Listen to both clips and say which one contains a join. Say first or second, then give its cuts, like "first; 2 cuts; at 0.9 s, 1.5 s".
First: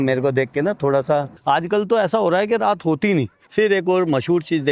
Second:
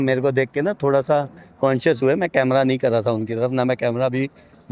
first; 2 cuts; at 1.3 s, 3.4 s